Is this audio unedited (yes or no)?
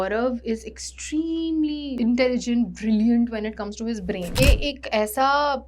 no